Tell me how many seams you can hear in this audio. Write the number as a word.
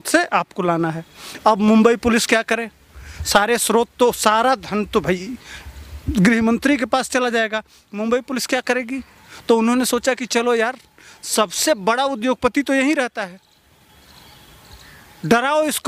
zero